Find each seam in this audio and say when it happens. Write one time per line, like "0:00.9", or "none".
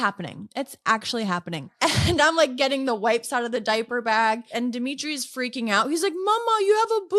0:01.7
0:04.5